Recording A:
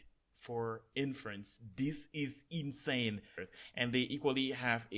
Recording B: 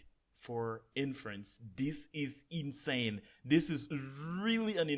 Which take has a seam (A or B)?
A